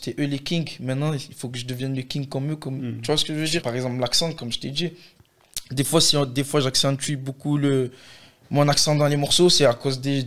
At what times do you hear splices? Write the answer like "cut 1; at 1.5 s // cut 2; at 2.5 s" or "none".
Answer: cut 1; at 3.6 s